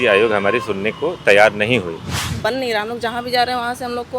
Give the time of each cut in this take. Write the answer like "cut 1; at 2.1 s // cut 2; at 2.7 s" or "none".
cut 1; at 2.3 s